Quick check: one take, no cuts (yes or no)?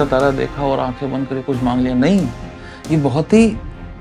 yes